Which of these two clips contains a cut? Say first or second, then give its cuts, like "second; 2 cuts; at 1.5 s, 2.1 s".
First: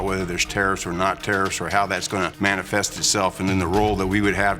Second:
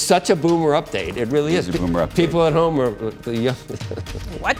first; 1 cut; at 2.3 s